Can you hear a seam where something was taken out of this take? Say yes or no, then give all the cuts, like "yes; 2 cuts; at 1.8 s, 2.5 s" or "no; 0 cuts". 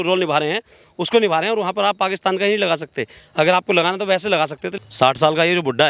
yes; 1 cut; at 4.7 s